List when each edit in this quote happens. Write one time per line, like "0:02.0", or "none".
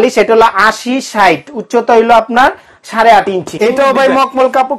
0:03.5

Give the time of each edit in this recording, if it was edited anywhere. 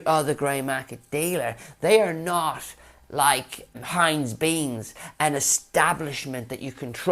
0:03.8

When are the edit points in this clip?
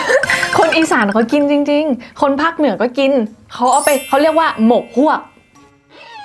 none

